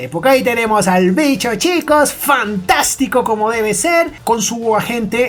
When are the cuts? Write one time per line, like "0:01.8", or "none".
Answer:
none